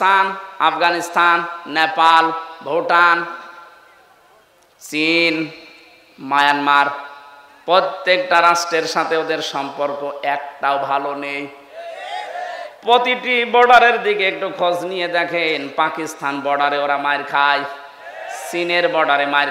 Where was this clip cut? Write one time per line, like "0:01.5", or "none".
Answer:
none